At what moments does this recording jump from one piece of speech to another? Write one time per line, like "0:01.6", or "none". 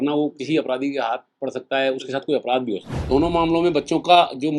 0:02.9